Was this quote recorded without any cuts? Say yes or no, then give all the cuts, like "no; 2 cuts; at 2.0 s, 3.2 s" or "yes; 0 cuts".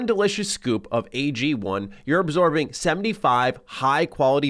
yes; 0 cuts